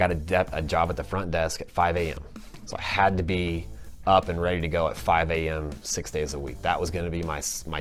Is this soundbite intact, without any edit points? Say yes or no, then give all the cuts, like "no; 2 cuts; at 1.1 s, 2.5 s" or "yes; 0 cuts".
yes; 0 cuts